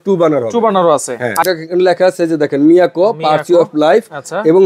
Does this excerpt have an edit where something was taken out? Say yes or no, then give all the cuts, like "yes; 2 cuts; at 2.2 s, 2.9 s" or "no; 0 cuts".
yes; 1 cut; at 1.4 s